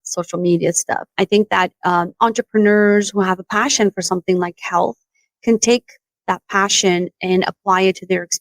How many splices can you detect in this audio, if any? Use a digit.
1